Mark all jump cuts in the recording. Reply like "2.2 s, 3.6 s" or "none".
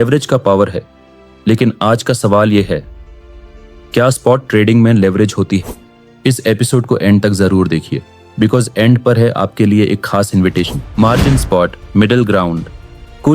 10.8 s